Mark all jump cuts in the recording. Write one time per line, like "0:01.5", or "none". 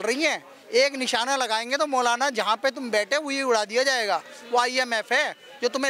none